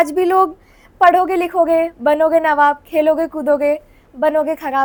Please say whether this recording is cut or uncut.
uncut